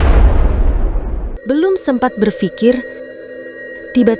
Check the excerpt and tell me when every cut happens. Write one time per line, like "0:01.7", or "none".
0:01.3